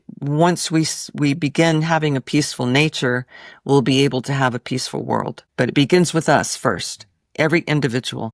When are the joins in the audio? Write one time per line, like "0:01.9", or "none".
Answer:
0:05.4